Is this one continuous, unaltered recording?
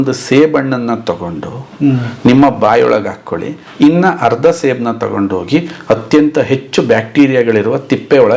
yes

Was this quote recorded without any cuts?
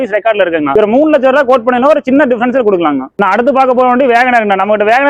no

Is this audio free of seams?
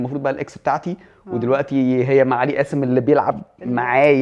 yes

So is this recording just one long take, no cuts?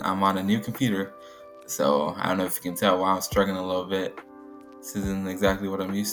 yes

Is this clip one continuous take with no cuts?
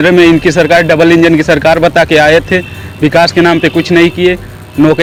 yes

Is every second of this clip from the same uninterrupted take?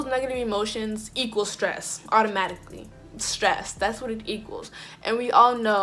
yes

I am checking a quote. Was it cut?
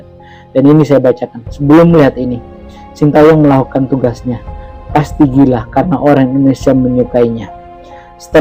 no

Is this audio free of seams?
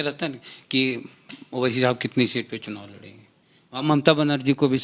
yes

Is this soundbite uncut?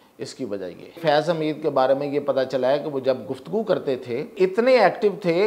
no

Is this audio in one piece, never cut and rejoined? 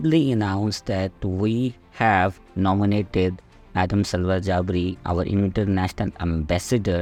yes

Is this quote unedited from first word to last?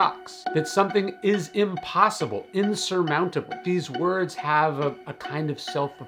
yes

